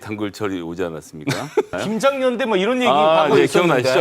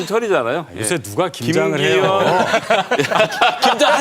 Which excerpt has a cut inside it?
first; 1 cut; at 1.8 s

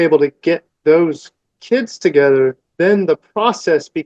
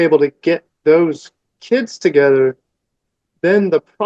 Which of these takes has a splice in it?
first; 1 cut; at 2.6 s

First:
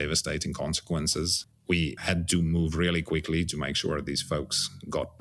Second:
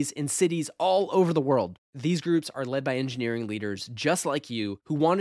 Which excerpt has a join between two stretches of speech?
first; 1 cut; at 1.6 s

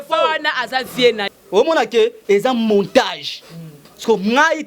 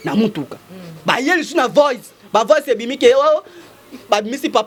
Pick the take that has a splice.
first; 1 cut; at 1.2 s

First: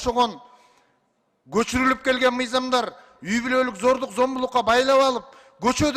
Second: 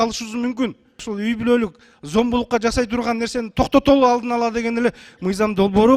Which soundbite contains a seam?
second; 1 cut; at 1.1 s

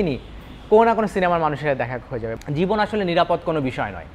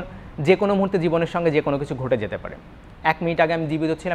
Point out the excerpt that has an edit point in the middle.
first; 1 cut; at 2.3 s

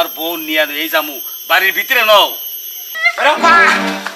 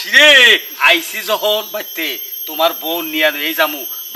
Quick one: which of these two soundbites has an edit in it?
first; 1 cut; at 2.7 s

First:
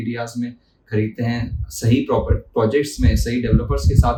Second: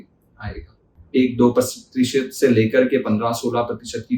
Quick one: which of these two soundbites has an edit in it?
second; 1 cut; at 1.0 s

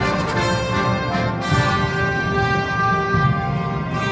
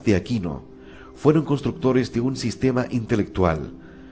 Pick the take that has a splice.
first; 1 cut; at 2.6 s

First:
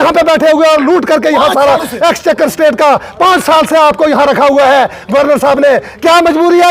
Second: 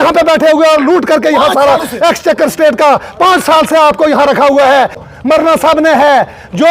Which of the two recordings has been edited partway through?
second; 1 cut; at 5.0 s

